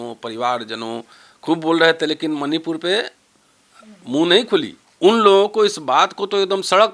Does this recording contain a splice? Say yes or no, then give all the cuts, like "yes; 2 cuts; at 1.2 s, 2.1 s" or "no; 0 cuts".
yes; 1 cut; at 4.8 s